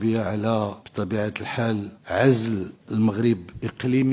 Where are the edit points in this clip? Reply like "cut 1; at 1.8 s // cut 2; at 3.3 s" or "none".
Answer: cut 1; at 0.8 s // cut 2; at 2.0 s // cut 3; at 2.8 s